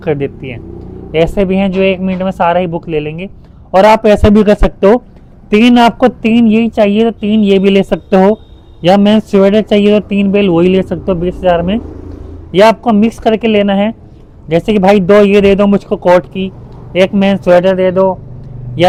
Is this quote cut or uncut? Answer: uncut